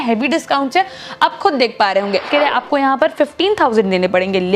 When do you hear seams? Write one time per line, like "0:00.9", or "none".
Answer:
0:02.3